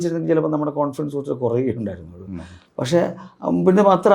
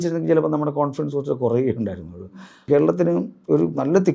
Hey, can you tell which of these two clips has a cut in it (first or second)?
second